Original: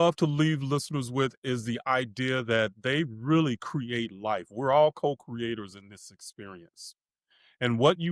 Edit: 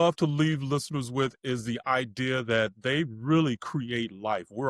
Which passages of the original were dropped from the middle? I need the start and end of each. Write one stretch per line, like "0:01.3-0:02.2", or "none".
none